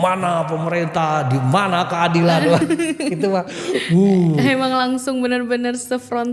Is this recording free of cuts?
yes; 0 cuts

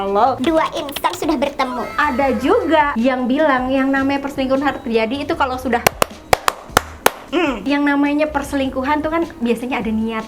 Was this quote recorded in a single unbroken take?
no; 1 cut; at 7.6 s

